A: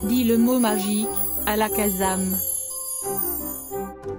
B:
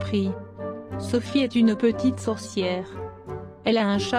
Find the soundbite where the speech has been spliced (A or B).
A